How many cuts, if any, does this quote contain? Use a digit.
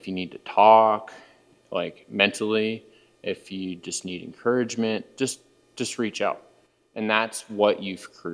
0